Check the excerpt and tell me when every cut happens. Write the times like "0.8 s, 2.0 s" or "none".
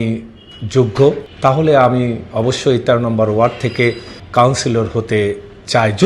1.3 s, 4.1 s